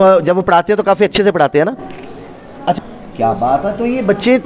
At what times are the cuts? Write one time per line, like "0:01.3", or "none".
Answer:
0:02.8